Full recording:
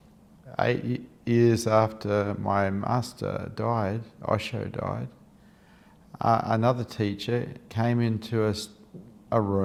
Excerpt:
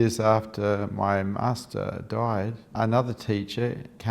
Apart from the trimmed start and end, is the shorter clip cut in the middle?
yes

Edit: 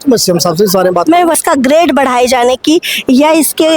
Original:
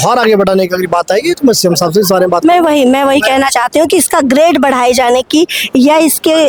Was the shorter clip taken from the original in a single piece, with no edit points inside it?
no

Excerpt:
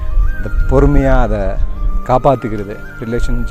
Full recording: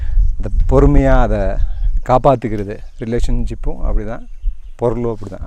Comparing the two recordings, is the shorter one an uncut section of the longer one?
yes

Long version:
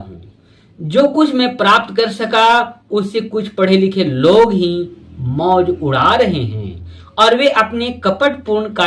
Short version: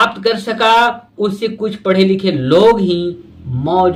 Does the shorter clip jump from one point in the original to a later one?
no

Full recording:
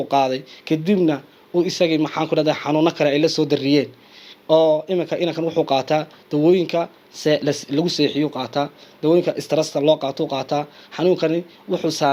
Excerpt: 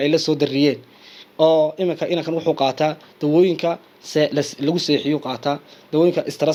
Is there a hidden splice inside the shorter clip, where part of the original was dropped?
no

